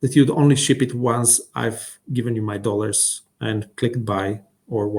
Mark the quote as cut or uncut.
uncut